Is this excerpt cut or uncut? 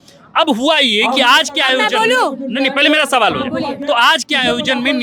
uncut